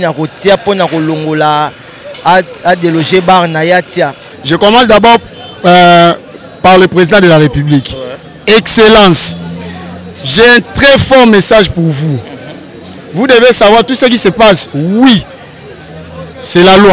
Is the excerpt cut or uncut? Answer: cut